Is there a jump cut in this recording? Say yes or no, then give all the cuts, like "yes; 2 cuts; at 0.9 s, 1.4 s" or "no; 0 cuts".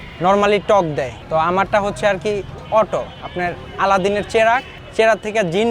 yes; 2 cuts; at 1.2 s, 4.8 s